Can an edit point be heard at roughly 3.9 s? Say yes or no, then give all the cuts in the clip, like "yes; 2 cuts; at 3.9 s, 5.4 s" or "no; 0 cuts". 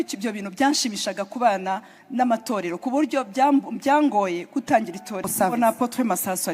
no; 1 cut; at 5.2 s